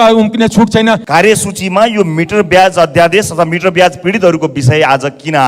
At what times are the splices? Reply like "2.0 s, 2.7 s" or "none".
1.0 s